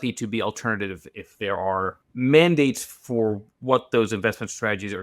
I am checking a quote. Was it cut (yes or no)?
yes